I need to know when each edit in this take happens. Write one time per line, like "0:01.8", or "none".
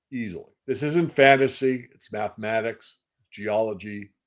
none